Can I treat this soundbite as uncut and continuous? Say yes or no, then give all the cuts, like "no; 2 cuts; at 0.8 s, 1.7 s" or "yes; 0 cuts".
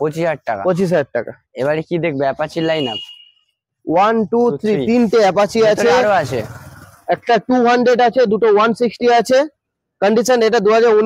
yes; 0 cuts